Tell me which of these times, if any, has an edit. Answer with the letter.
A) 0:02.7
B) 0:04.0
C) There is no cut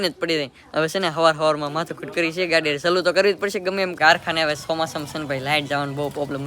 B